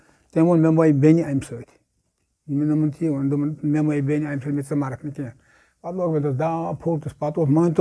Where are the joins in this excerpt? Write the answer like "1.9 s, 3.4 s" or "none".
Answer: none

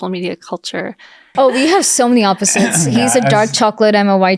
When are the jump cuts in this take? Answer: 1.2 s

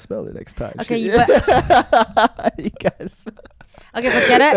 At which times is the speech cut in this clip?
none

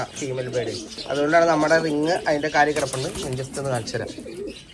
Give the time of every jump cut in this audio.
1.0 s

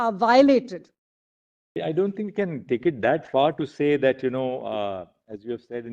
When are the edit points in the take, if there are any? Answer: 1.8 s

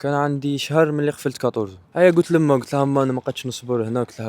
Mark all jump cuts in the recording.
1.8 s

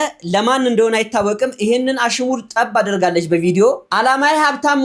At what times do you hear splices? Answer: 3.9 s

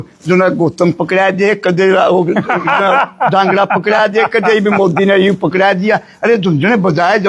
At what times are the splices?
none

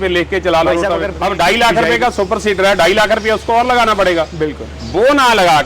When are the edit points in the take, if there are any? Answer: 1.1 s

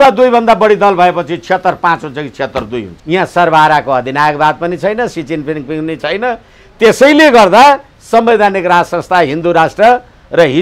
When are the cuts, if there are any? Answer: 2.9 s

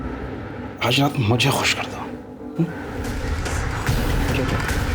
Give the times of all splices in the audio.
3.3 s

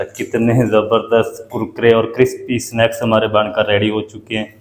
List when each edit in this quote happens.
none

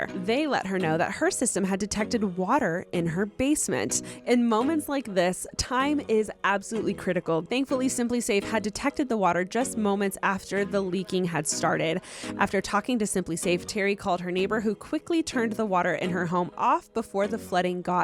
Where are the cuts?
7.4 s

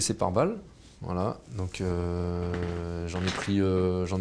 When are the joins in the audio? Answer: none

